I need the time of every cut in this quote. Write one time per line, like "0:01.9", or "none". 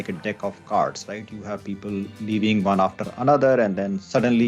none